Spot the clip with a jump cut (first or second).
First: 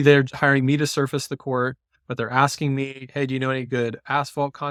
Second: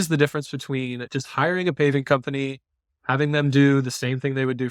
second